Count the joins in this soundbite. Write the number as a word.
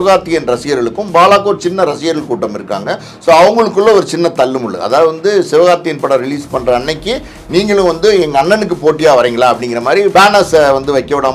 one